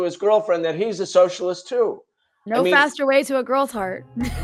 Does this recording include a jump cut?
no; 0 cuts

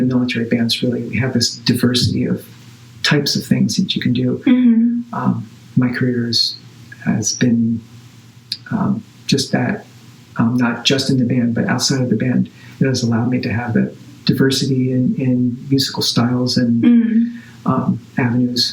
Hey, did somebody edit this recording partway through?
no; 0 cuts

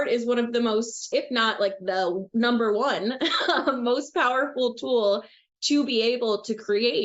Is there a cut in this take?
yes; 1 cut; at 1.1 s

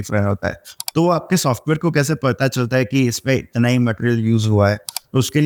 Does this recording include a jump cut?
no; 0 cuts

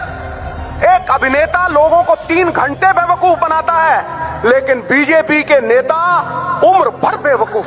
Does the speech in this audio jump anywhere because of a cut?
no; 0 cuts

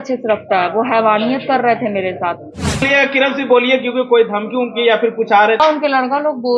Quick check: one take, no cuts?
no; 2 cuts; at 2.9 s, 5.6 s

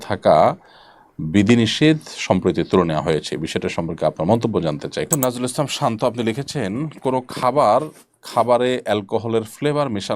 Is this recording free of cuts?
no; 1 cut; at 5.0 s

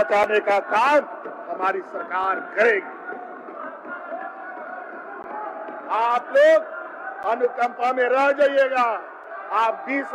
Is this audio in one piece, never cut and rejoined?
yes; 0 cuts

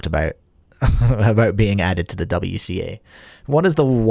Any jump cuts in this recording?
no; 0 cuts

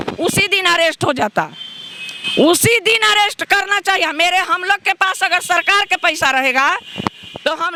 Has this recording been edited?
no; 0 cuts

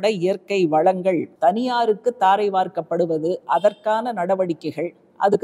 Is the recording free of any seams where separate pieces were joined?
no; 1 cut; at 1.3 s

